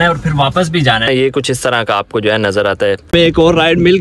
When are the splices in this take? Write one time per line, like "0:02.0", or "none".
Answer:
0:01.1
0:03.1